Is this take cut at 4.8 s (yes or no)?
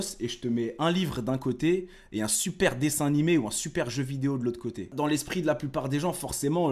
yes